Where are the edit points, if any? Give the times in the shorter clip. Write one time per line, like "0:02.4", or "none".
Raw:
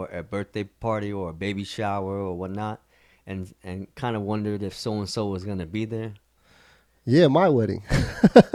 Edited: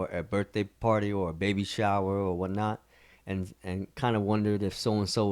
none